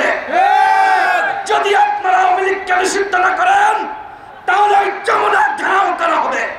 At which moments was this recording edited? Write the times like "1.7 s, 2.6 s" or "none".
none